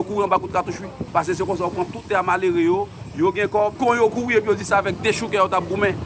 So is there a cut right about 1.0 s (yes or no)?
yes